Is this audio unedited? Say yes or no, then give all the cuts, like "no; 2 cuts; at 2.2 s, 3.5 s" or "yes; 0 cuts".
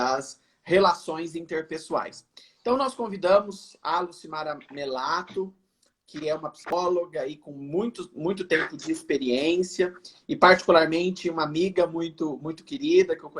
no; 1 cut; at 6.7 s